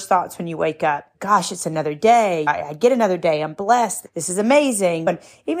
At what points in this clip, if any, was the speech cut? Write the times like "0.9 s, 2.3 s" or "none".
none